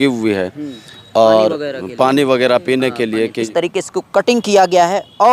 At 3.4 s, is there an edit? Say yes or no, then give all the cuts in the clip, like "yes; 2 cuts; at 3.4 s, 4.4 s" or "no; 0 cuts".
yes; 1 cut; at 3.4 s